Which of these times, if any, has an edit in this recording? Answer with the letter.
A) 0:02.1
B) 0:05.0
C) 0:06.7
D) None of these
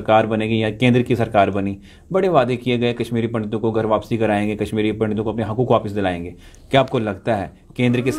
D